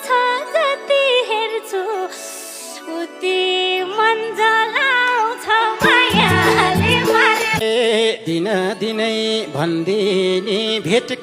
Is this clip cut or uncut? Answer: cut